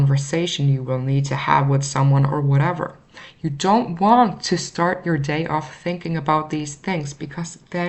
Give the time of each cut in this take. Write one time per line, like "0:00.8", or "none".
none